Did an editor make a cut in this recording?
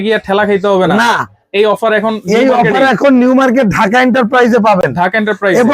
no; 0 cuts

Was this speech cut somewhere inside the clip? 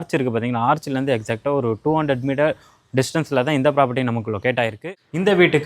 yes; 1 cut; at 4.7 s

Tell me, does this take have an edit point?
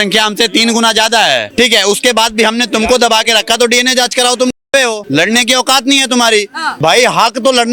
yes; 3 cuts; at 1.5 s, 5.0 s, 6.6 s

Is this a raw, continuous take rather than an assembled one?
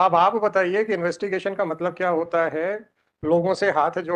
yes; 0 cuts

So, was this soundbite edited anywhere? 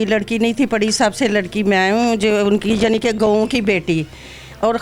no; 0 cuts

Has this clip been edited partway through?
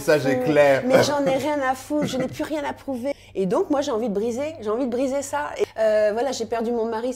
yes; 2 cuts; at 3.1 s, 5.7 s

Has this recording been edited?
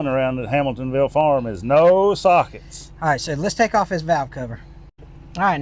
no; 0 cuts

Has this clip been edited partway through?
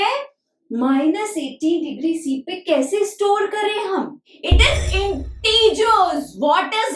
yes; 1 cut; at 4.3 s

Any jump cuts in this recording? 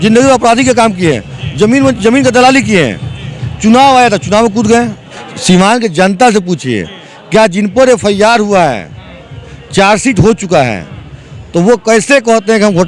yes; 1 cut; at 5.0 s

